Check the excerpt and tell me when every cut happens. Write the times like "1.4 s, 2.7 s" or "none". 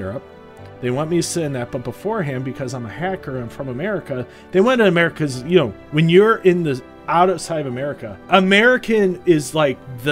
8.2 s